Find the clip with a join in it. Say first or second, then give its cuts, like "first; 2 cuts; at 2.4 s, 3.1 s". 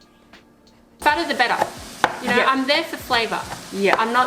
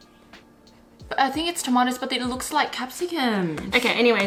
first; 1 cut; at 0.9 s